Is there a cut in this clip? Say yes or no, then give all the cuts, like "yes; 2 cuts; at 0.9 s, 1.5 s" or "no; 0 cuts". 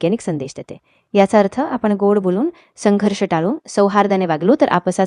no; 0 cuts